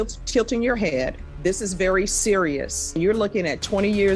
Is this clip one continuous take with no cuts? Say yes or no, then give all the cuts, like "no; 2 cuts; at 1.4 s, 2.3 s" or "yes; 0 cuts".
no; 2 cuts; at 1.2 s, 3.0 s